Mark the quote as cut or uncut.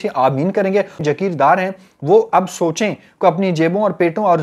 cut